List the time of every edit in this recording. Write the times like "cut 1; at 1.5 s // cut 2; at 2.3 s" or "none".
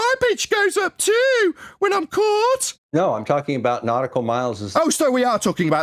cut 1; at 2.7 s

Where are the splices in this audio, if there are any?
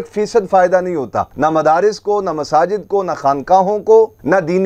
none

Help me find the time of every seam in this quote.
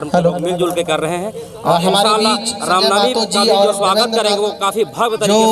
none

